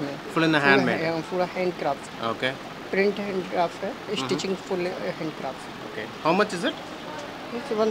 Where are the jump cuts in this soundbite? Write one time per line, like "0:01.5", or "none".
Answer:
none